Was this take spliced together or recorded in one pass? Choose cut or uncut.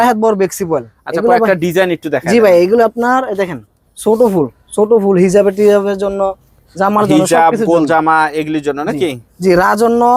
uncut